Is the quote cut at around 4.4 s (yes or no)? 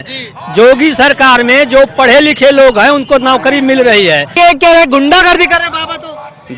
yes